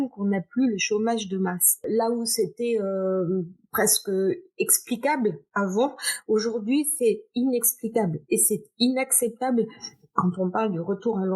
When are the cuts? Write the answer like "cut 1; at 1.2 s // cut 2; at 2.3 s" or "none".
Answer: cut 1; at 1.8 s